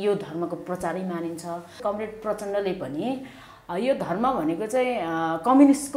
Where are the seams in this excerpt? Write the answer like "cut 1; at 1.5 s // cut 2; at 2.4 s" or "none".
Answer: cut 1; at 1.7 s